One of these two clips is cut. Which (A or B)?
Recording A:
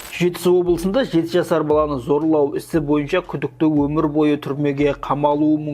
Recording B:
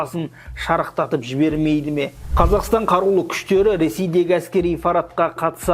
B